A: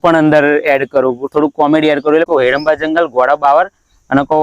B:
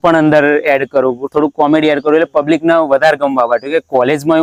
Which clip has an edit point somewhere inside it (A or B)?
A